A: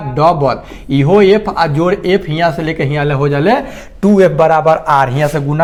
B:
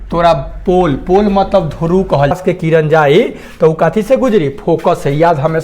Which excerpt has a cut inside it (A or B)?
B